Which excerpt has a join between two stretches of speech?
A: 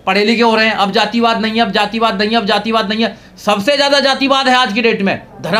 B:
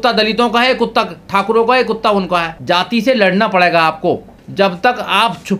B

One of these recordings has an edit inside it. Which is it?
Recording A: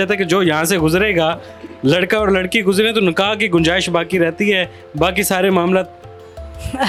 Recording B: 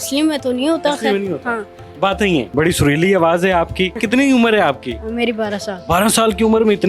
B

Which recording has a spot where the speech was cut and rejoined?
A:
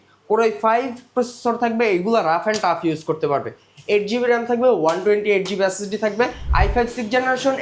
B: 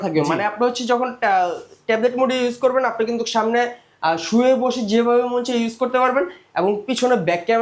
A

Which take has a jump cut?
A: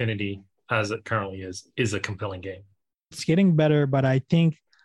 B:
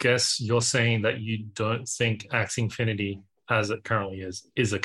A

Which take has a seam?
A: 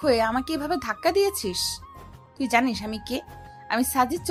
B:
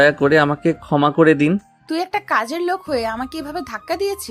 B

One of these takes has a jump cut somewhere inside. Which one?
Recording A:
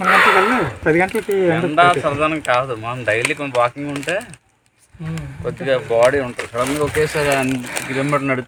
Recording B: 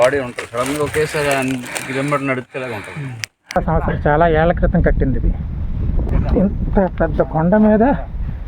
B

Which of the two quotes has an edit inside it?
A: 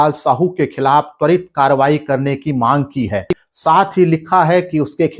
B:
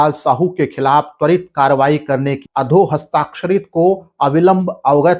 B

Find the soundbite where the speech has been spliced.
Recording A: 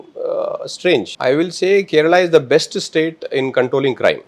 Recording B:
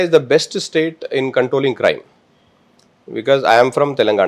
A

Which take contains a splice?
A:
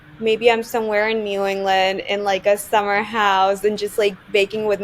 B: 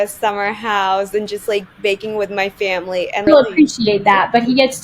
B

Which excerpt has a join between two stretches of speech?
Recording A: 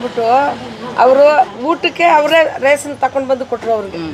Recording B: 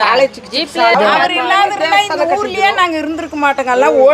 B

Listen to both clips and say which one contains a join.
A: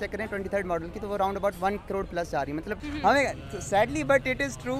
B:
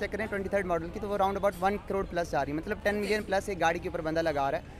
A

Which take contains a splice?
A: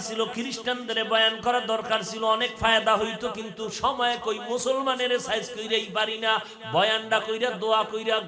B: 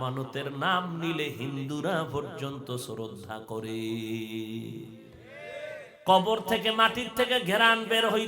B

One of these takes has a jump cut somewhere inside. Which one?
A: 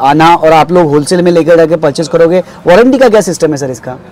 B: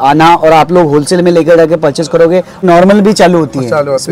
B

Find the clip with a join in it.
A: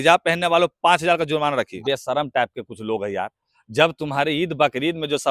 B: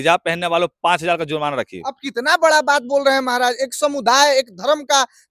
A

